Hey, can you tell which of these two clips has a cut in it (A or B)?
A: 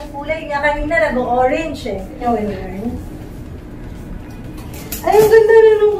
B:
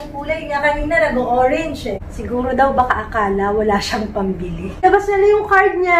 B